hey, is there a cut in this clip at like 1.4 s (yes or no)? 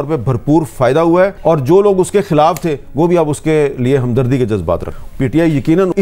yes